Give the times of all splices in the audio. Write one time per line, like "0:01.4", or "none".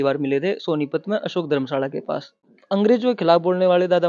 0:02.6